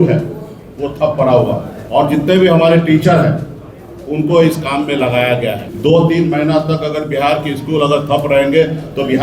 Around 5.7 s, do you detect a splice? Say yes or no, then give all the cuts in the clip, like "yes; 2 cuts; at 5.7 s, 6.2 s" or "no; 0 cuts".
yes; 2 cuts; at 1.7 s, 5.7 s